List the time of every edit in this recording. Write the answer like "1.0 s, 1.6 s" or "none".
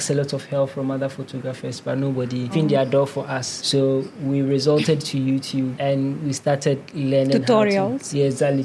none